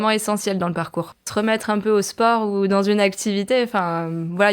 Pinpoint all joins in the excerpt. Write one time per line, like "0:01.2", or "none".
0:01.2